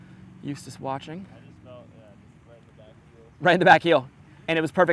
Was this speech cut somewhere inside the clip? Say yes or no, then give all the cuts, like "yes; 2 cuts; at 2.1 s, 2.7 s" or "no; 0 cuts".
no; 0 cuts